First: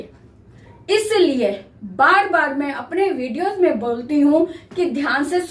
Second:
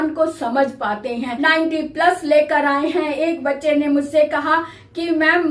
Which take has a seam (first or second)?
second